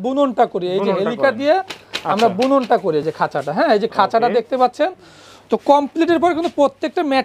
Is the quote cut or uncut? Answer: uncut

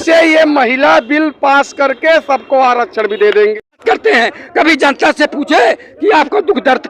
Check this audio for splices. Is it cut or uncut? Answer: cut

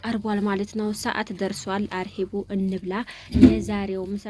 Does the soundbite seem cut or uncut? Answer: uncut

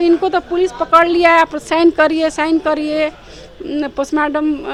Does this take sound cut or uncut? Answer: uncut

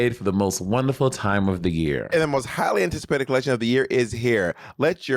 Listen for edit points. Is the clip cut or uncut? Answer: uncut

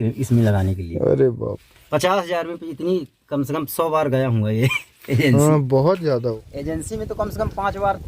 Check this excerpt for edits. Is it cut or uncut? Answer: cut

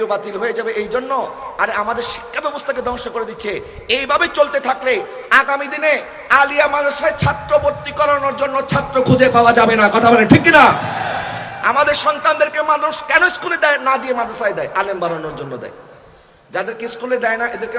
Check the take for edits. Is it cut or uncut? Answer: uncut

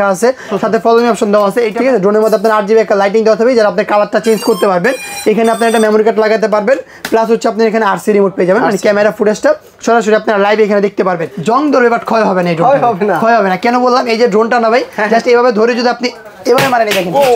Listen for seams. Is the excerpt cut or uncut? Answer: cut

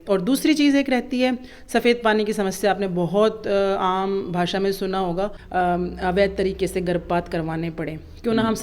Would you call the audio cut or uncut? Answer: cut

